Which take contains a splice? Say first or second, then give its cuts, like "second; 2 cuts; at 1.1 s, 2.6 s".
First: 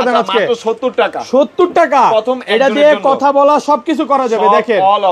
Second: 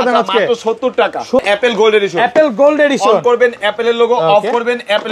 second; 1 cut; at 1.4 s